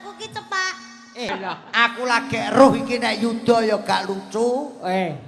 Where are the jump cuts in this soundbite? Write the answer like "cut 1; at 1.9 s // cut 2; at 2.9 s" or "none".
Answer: cut 1; at 1.3 s